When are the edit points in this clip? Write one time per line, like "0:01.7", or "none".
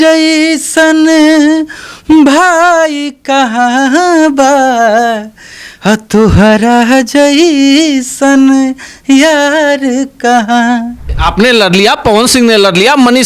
0:11.0